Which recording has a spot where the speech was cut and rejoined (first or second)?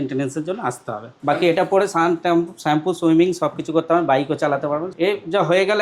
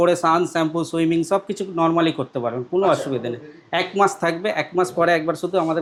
first